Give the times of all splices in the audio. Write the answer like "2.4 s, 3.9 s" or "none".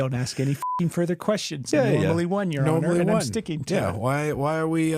none